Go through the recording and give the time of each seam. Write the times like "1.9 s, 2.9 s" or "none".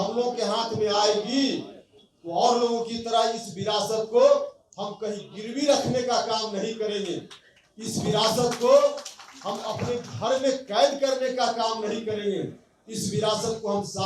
none